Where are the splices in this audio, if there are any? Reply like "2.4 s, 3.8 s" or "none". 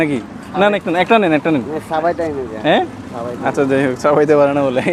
none